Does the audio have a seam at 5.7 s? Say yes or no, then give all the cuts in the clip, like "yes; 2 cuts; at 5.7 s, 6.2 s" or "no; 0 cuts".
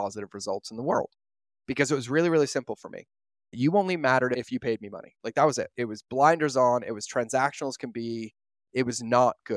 yes; 3 cuts; at 3.5 s, 4.4 s, 5.7 s